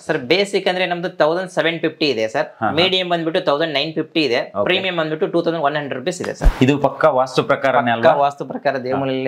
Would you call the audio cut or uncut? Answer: cut